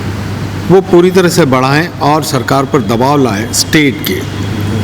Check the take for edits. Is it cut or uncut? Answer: uncut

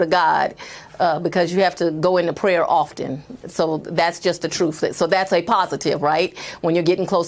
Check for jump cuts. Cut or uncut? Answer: uncut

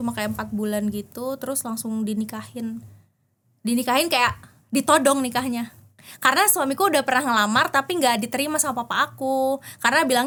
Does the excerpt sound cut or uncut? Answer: uncut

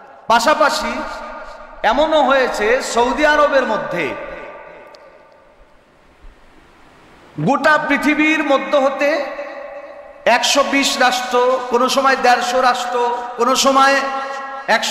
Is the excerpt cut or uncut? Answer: uncut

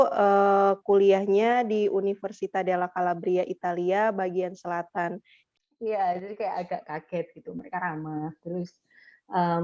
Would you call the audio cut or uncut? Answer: cut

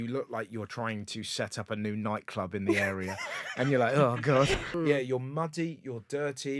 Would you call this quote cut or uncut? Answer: cut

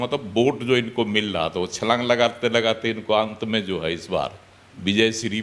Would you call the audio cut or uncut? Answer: uncut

